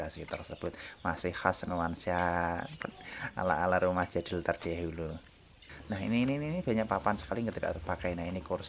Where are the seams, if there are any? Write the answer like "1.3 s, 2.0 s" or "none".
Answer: 5.7 s